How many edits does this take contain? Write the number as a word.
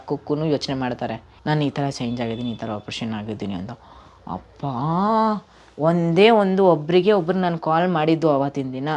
one